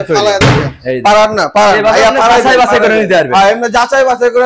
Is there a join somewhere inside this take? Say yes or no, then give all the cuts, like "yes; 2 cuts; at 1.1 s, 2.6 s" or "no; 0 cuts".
no; 0 cuts